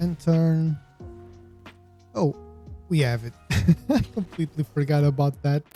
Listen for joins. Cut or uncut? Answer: uncut